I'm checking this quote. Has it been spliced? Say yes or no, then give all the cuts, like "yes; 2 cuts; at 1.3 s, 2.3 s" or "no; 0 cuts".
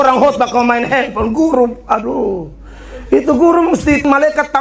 no; 0 cuts